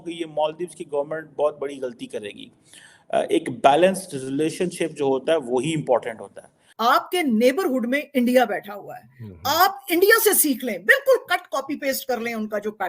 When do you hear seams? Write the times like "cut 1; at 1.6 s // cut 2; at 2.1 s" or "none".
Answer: cut 1; at 6.6 s